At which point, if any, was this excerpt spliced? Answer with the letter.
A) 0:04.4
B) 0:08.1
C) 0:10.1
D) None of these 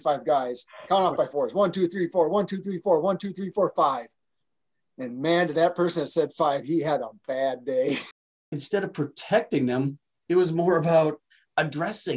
B